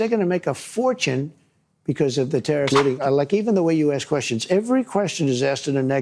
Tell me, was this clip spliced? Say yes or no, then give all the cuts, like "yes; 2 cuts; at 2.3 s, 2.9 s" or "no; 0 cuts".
yes; 1 cut; at 2.7 s